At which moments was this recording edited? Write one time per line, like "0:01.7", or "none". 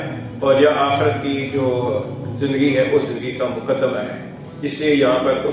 none